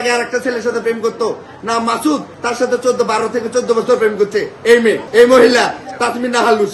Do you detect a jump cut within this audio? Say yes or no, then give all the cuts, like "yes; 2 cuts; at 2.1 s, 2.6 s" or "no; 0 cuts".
no; 0 cuts